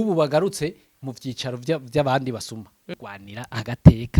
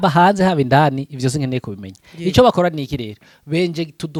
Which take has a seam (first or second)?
first